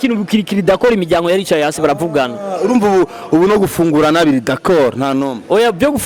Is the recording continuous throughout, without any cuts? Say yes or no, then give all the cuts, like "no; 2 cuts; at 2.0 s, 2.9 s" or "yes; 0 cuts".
yes; 0 cuts